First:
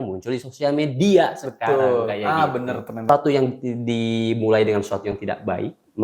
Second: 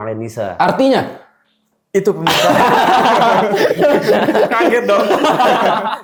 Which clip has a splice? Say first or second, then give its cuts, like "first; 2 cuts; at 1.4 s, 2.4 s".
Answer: first; 1 cut; at 3.1 s